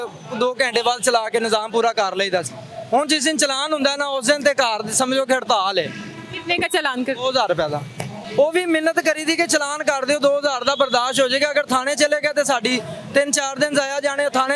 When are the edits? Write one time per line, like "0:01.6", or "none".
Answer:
none